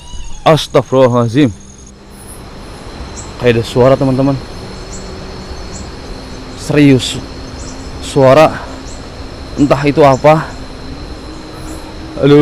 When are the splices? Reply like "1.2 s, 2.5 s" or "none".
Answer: 1.7 s

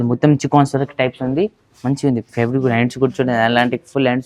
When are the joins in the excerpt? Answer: none

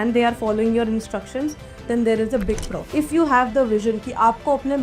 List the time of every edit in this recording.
2.9 s

